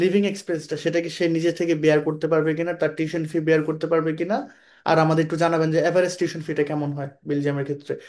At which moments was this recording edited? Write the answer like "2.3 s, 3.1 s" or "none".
none